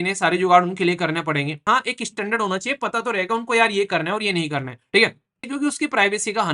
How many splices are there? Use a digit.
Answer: 2